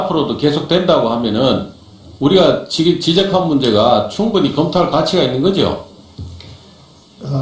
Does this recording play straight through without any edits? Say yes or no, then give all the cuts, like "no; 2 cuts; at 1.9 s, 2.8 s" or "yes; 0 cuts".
yes; 0 cuts